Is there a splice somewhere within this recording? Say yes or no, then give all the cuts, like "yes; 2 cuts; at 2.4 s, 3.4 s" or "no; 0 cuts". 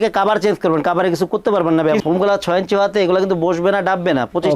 yes; 1 cut; at 2.0 s